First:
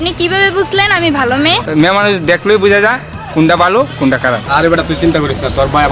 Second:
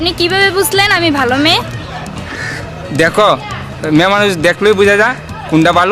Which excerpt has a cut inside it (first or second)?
first